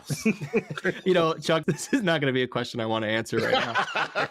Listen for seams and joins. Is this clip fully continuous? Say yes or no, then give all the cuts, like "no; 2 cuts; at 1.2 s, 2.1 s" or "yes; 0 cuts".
no; 1 cut; at 1.6 s